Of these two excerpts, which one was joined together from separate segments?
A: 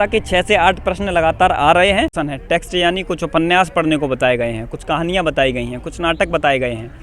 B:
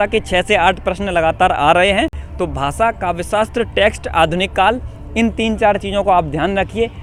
A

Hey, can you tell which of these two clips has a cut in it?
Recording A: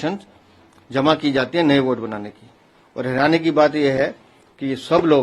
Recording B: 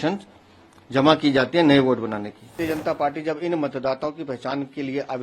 B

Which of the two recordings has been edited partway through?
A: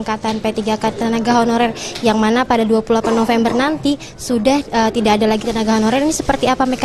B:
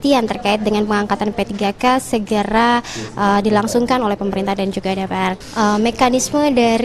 B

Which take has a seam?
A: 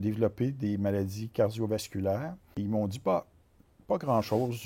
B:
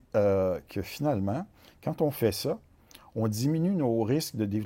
A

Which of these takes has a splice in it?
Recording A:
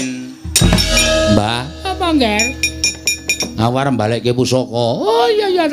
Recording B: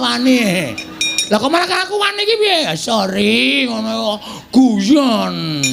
A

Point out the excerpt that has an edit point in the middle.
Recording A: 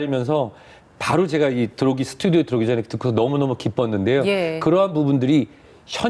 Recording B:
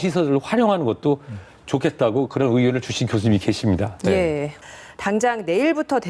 B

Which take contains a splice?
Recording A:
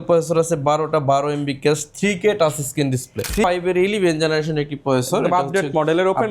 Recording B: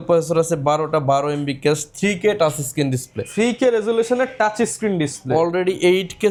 A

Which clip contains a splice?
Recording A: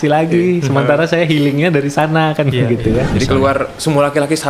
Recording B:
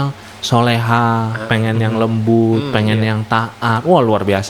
A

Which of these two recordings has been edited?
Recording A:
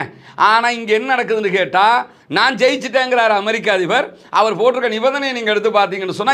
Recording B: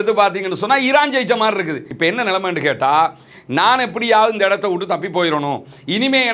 B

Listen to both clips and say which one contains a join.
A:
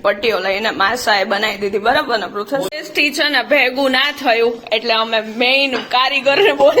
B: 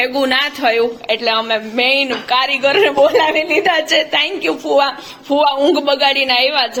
A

